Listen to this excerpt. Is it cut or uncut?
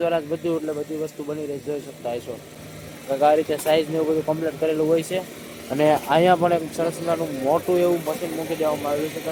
uncut